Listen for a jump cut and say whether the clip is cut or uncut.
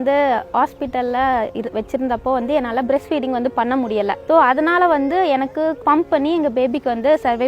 cut